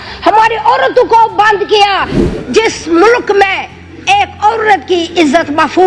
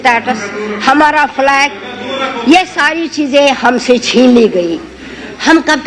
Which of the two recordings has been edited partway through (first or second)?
first